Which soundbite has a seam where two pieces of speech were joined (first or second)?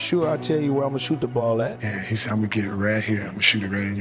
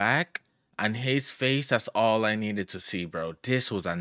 first